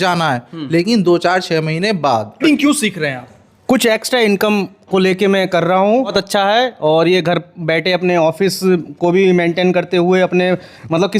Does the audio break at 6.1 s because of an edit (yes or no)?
yes